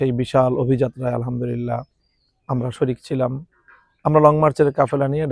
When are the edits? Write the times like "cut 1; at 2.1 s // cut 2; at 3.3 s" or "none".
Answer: none